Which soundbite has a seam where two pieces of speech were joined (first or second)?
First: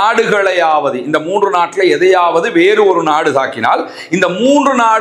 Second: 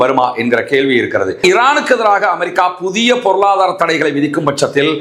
second